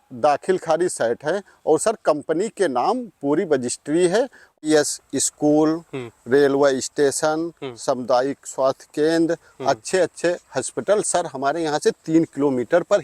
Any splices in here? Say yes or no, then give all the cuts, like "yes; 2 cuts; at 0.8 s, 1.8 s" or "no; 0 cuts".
yes; 1 cut; at 4.5 s